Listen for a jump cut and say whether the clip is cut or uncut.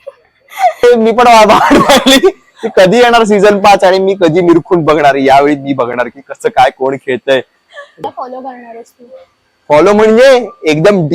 cut